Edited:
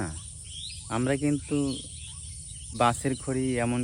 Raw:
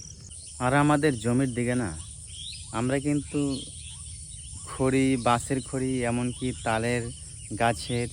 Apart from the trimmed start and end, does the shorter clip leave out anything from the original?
yes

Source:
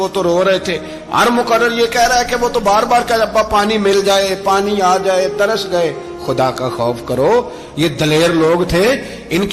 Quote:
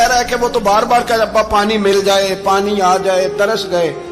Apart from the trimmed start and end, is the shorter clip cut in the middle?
no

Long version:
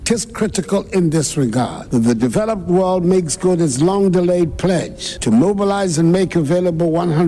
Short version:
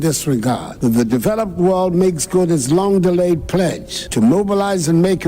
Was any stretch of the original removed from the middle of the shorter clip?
no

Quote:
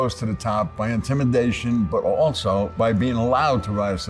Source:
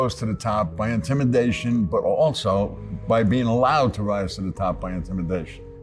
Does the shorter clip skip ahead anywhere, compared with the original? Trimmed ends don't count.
yes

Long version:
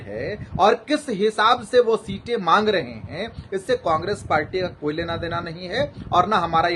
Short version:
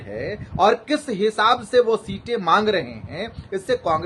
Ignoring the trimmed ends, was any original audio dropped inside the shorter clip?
no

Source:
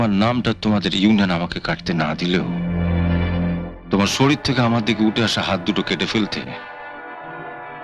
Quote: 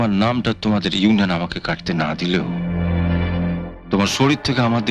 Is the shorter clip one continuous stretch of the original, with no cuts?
yes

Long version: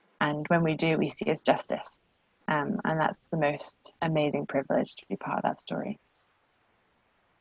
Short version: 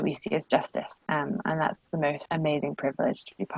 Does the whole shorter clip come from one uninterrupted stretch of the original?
no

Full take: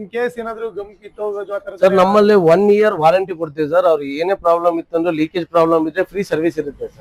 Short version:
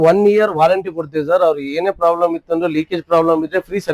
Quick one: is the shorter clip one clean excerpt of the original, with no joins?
yes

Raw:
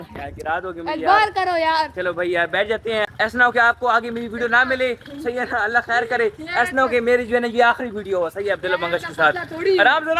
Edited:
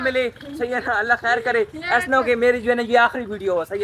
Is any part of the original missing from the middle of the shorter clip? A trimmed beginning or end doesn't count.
no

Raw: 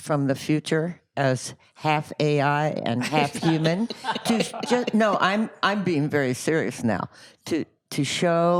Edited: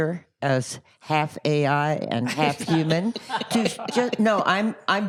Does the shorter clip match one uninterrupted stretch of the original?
yes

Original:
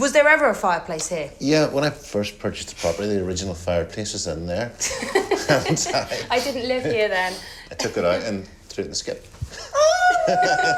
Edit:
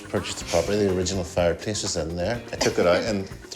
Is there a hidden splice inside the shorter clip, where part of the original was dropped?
yes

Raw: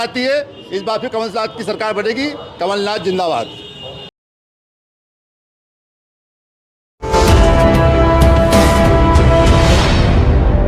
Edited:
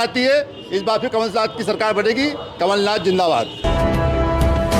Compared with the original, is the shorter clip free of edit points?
no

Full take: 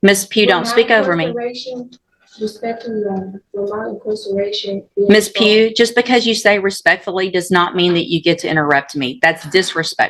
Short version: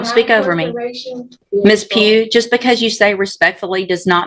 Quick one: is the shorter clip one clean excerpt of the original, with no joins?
no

